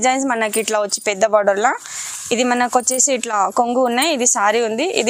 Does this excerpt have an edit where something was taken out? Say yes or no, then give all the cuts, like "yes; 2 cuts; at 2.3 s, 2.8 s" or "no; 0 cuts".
no; 0 cuts